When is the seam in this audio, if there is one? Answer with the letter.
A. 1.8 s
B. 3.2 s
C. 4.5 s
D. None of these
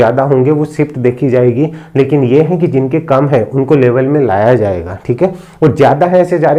D